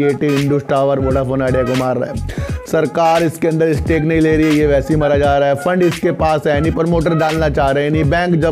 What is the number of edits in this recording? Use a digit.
0